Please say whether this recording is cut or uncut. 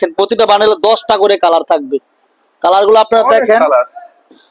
uncut